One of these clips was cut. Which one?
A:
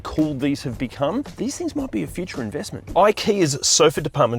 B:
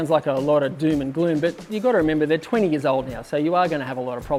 A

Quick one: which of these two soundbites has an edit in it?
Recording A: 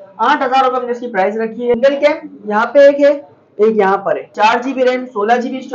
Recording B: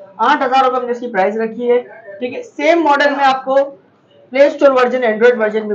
A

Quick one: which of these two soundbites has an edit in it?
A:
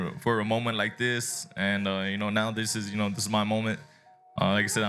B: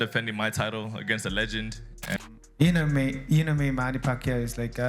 B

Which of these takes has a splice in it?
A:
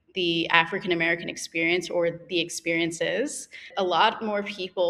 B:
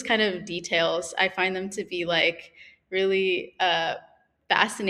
A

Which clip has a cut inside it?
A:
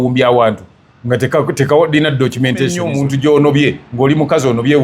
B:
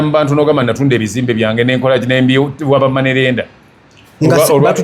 A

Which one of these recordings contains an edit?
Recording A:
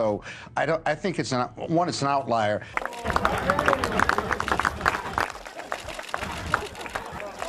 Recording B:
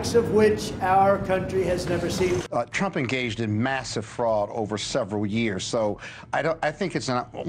A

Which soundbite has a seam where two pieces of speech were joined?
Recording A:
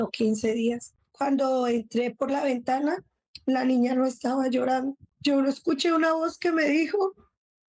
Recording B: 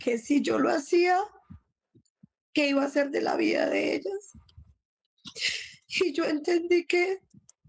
A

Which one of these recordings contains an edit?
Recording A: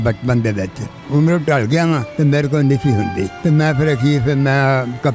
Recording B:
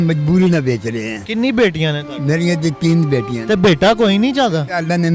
A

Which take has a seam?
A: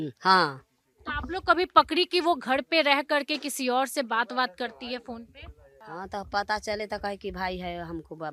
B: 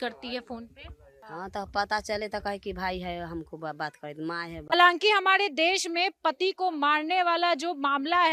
B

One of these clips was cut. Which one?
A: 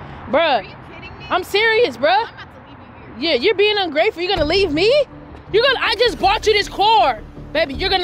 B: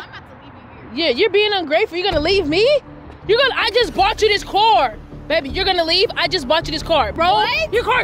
B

